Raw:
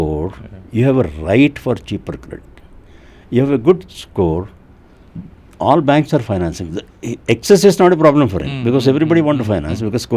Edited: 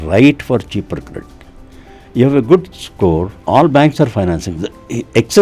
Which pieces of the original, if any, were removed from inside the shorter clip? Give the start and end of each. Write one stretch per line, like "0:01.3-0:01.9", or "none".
0:04.5-0:05.5